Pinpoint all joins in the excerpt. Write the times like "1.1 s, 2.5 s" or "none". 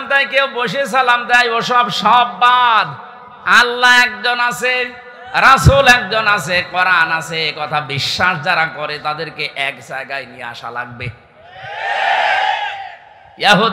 none